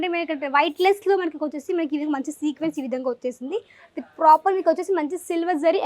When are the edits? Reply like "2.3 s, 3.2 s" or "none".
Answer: none